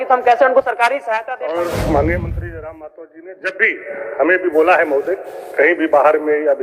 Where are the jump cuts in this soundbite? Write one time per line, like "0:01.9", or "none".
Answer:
0:01.5